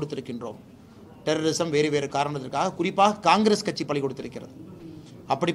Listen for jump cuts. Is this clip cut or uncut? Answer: uncut